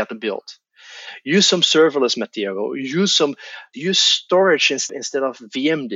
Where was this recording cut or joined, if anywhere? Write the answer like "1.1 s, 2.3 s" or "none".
3.7 s, 4.9 s